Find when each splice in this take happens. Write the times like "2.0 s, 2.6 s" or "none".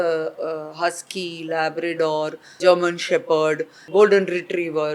2.5 s, 3.8 s